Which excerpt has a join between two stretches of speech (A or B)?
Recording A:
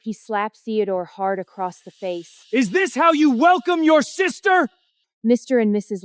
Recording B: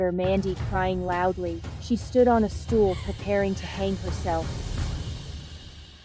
A